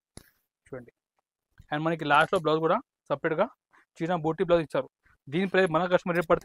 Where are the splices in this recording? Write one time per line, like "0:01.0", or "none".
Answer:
none